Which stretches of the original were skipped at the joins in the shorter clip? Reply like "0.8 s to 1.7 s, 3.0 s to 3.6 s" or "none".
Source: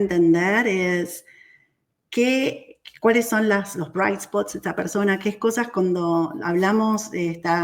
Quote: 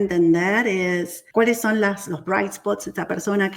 1.2 s to 2.9 s